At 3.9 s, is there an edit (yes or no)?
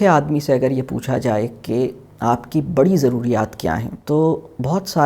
yes